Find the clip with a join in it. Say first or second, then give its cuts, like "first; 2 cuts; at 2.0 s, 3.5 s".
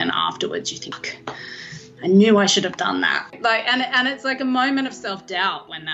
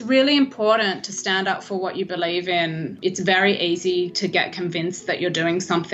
first; 1 cut; at 3.3 s